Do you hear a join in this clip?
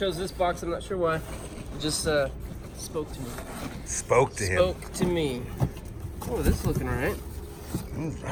no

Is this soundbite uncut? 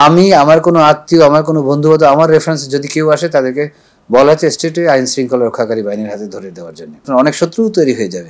no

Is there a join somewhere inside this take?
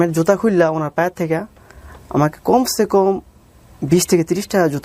no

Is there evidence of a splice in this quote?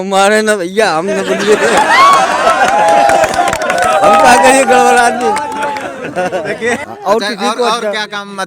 yes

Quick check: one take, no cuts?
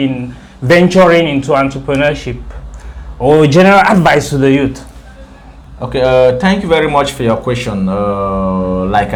yes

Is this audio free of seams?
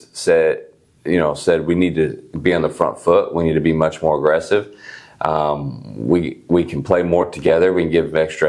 yes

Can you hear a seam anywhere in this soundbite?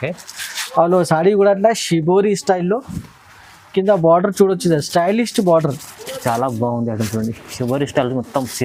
no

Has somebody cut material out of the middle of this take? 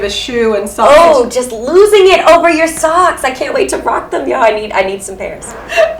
no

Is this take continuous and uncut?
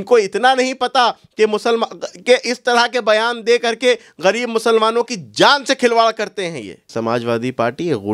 no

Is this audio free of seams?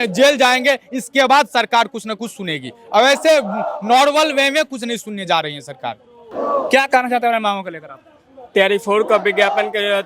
yes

